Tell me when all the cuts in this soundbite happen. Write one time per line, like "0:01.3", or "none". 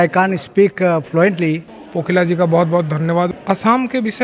0:01.7
0:03.3